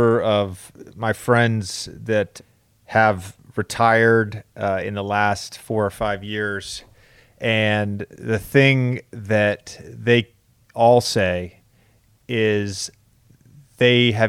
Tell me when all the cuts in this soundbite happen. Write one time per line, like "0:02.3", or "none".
0:02.3